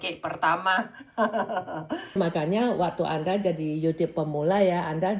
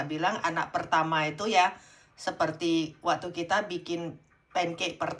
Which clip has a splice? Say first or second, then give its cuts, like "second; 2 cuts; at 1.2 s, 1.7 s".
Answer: first; 1 cut; at 2.2 s